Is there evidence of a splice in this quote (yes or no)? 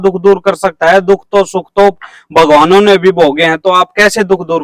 no